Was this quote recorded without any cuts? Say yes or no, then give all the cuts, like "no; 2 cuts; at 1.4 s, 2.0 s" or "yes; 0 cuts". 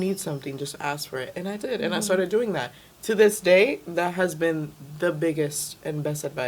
yes; 0 cuts